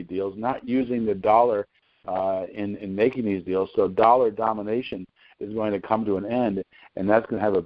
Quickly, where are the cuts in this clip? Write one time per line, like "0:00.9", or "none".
none